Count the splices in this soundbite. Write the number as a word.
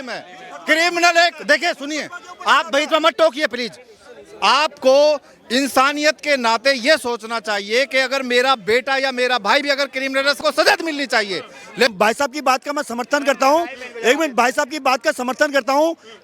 one